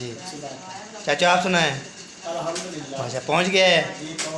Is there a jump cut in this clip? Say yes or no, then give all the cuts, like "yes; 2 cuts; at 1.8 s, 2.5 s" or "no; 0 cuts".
no; 0 cuts